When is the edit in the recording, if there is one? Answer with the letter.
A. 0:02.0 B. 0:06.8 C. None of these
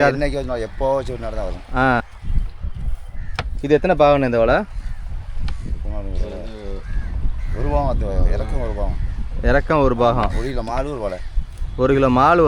A